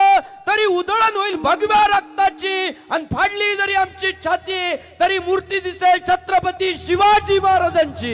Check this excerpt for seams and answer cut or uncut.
uncut